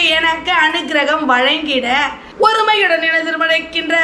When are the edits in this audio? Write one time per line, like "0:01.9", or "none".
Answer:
0:02.2